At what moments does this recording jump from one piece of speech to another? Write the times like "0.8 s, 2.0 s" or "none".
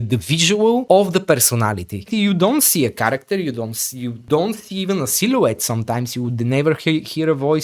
0.8 s, 2.1 s, 4.1 s

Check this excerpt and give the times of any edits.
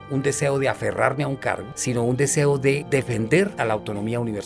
2.8 s, 3.5 s

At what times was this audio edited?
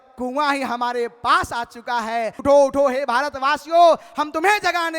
2.4 s

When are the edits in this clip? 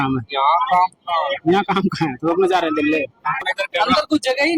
3.6 s

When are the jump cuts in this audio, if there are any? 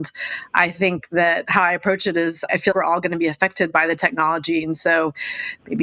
none

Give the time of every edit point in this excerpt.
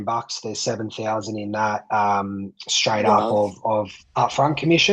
4.0 s

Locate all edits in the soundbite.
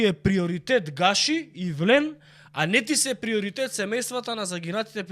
none

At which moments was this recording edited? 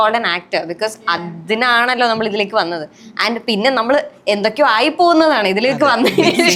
none

